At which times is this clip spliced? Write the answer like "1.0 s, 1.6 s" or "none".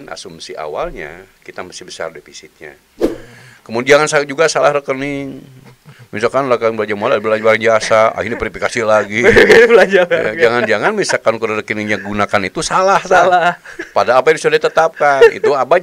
2.9 s